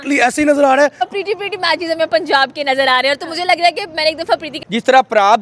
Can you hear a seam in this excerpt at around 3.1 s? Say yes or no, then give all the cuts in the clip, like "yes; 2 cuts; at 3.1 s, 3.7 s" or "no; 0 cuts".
no; 2 cuts; at 1.1 s, 4.5 s